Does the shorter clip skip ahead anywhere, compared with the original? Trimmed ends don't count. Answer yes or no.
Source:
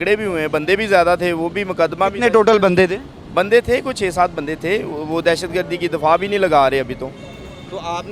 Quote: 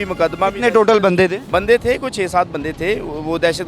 yes